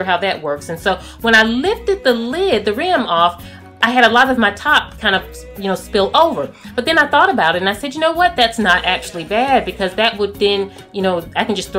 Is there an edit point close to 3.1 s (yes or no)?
no